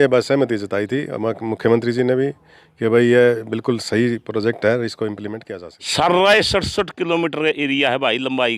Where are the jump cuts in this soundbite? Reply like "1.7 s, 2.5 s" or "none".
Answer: 5.3 s